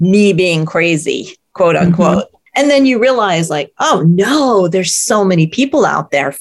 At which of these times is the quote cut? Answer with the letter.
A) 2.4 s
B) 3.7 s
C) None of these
A